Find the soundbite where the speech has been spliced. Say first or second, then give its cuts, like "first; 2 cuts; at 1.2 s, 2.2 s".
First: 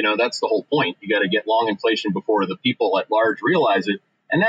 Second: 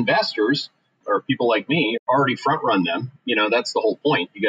second; 2 cuts; at 1.0 s, 2.0 s